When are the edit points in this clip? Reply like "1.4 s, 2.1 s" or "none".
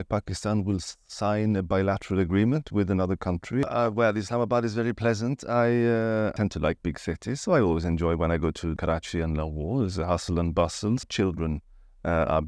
3.6 s, 6.3 s, 8.8 s, 11.1 s